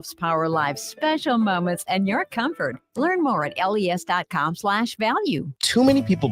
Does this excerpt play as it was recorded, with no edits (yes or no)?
no